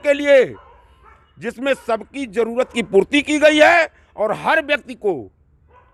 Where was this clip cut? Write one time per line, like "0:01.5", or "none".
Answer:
none